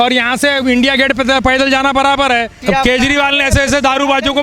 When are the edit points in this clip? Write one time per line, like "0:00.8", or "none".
0:02.5